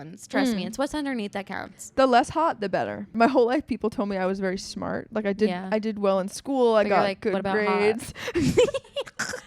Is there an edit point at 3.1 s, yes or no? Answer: yes